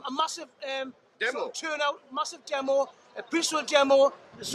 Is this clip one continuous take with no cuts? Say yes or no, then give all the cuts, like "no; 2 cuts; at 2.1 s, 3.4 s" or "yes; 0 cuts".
no; 1 cut; at 1.1 s